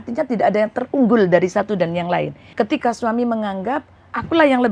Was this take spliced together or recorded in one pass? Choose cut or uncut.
cut